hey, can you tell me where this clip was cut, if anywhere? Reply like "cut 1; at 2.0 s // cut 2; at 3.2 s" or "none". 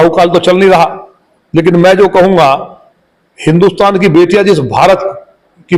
none